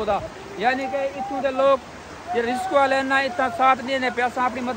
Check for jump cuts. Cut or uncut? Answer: uncut